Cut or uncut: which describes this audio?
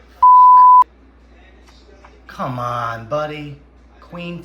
cut